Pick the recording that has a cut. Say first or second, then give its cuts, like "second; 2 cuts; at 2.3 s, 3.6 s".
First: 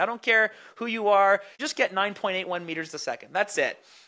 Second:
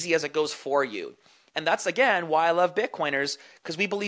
first; 1 cut; at 1.6 s